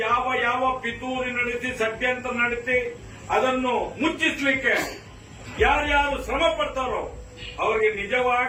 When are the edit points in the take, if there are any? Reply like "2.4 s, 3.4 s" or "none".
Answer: none